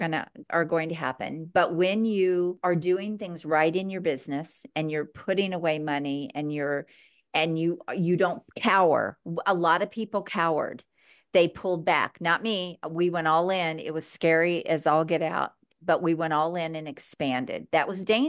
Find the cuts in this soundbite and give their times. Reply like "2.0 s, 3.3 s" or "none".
2.6 s